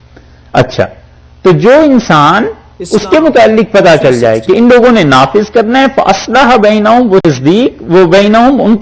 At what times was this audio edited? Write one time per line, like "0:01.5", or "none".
0:07.2